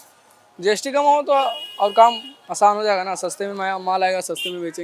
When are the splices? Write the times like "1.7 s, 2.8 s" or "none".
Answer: none